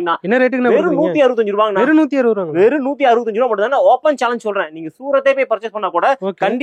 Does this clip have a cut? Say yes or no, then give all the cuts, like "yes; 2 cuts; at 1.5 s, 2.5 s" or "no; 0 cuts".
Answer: no; 0 cuts